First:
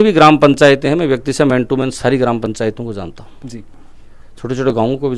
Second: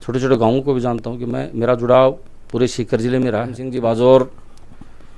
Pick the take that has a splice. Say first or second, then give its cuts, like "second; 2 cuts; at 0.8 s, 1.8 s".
second; 1 cut; at 3.6 s